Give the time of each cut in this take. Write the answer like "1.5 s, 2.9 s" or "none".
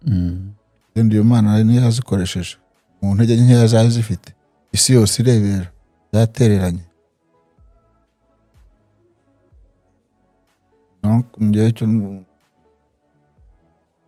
none